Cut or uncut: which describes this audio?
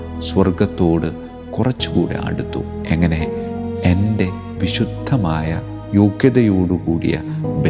uncut